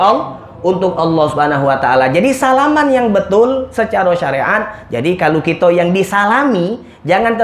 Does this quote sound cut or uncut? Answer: uncut